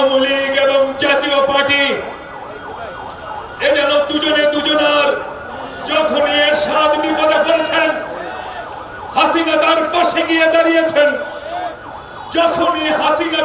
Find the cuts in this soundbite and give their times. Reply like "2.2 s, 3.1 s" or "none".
none